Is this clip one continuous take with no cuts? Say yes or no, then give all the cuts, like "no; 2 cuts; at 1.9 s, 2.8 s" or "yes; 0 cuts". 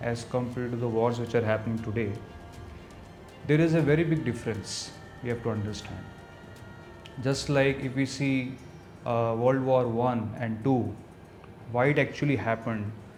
yes; 0 cuts